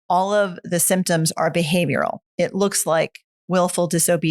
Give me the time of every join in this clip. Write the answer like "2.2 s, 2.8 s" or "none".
2.2 s